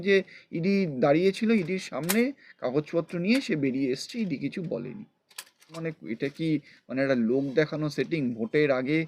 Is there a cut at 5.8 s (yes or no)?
yes